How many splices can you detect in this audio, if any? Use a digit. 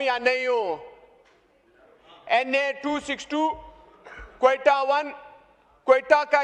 0